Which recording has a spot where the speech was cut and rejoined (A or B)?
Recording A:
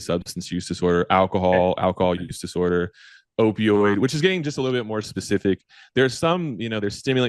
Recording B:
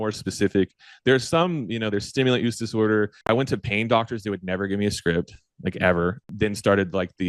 B